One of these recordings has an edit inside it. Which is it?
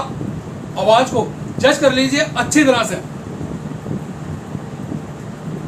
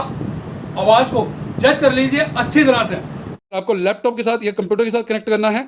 second; 1 cut; at 3.6 s

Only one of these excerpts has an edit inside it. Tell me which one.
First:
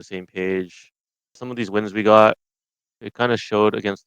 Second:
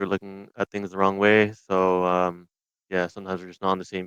first; 2 cuts; at 1.4 s, 3.0 s

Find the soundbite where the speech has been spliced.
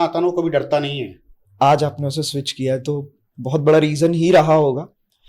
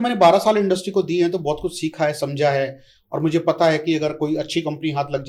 first; 1 cut; at 1.4 s

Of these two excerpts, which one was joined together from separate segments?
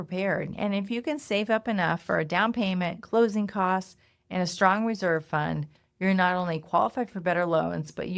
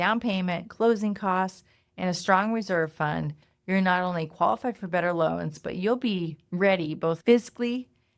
second; 1 cut; at 7.2 s

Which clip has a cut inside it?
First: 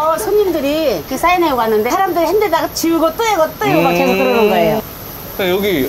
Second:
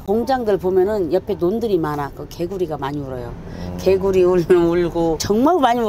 first; 3 cuts; at 1.1 s, 1.9 s, 4.8 s

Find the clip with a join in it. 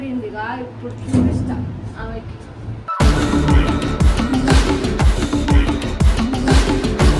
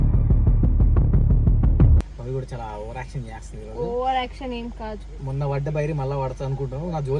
second; 1 cut; at 2.1 s

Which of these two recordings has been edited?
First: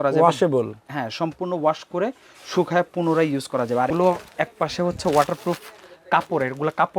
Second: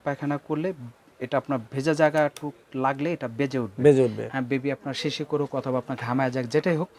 first; 1 cut; at 3.9 s

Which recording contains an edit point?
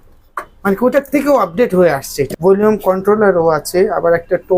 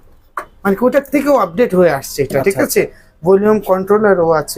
first; 1 cut; at 2.3 s

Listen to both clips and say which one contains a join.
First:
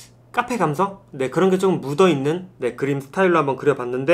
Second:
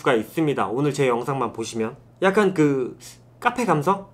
second; 1 cut; at 2.0 s

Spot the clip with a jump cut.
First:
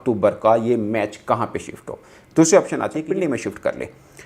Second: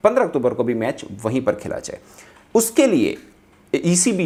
first; 1 cut; at 3.0 s

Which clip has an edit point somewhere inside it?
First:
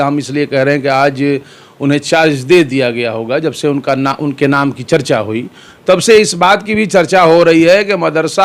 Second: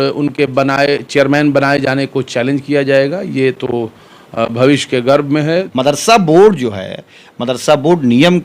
second; 1 cut; at 5.5 s

